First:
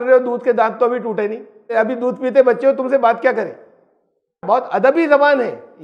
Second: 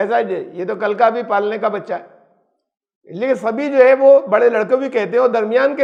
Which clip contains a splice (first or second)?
first